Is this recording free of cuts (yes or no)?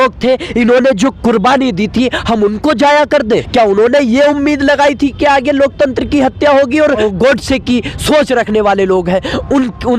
no